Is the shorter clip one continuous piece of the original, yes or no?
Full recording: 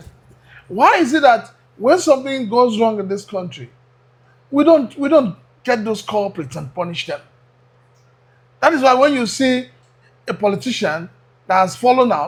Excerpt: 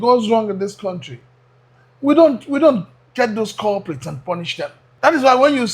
no